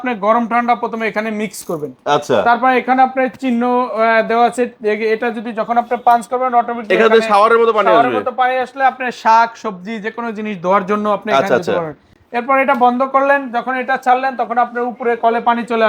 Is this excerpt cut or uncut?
uncut